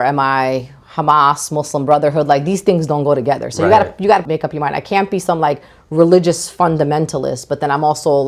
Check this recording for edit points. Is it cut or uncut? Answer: uncut